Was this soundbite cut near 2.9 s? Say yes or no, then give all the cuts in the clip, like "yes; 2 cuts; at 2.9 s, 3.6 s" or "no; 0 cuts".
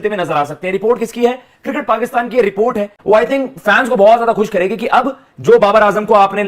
yes; 1 cut; at 2.9 s